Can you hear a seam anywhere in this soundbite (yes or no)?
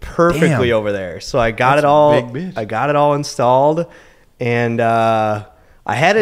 no